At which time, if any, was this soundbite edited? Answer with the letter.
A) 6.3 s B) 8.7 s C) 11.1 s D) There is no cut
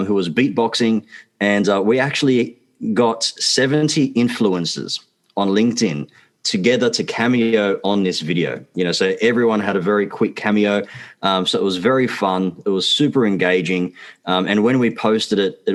D